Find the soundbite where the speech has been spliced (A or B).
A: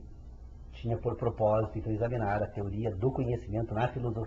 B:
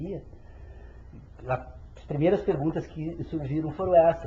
B